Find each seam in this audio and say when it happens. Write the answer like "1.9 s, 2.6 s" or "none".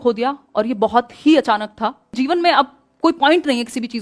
2.2 s